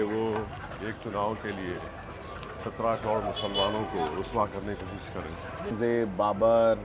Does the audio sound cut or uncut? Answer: cut